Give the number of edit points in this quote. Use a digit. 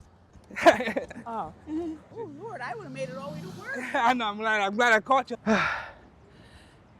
2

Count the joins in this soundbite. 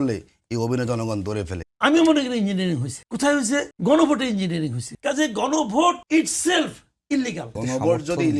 6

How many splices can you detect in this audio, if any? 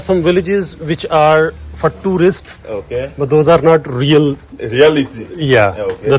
0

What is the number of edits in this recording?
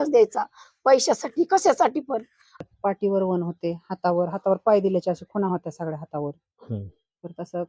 1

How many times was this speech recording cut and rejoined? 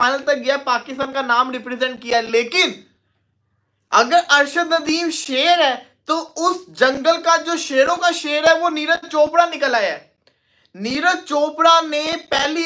0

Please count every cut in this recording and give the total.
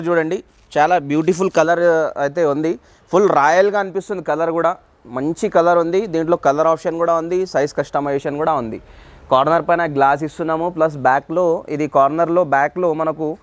0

